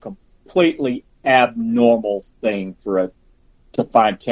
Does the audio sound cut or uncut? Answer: uncut